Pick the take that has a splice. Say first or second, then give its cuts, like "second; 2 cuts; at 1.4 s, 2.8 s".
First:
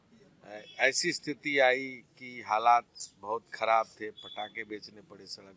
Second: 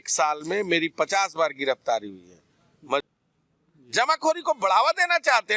second; 1 cut; at 3.1 s